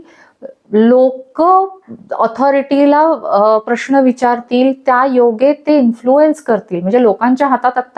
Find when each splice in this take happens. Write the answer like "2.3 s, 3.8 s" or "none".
none